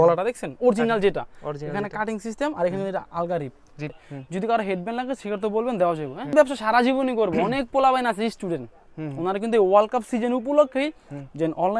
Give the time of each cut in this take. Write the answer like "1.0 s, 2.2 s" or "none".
4.1 s, 6.3 s